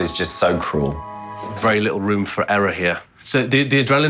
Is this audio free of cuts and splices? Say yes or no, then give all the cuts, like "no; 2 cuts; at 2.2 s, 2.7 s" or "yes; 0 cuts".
no; 1 cut; at 1.4 s